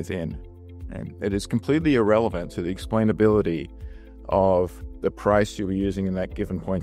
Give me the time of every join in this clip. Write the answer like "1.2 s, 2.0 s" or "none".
none